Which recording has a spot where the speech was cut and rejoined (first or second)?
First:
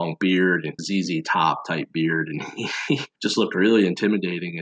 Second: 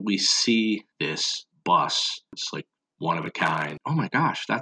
second